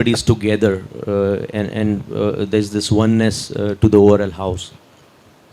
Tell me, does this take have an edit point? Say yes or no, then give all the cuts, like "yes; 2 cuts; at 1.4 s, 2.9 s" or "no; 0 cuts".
no; 0 cuts